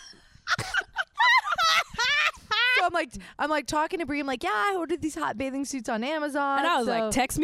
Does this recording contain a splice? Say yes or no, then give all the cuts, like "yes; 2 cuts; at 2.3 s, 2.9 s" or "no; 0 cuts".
no; 0 cuts